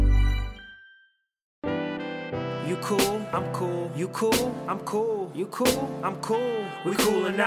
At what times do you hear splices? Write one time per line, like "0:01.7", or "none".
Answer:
0:01.5